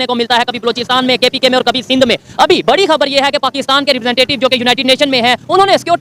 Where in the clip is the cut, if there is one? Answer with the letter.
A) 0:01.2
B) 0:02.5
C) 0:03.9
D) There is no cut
D